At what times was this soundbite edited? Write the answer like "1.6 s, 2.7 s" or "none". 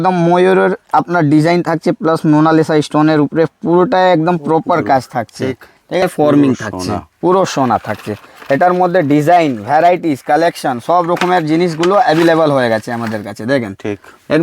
6.0 s